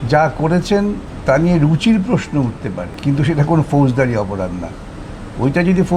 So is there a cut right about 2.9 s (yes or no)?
yes